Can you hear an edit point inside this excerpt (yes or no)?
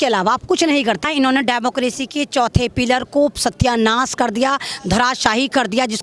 yes